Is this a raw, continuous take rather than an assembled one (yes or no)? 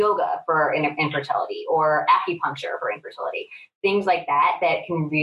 yes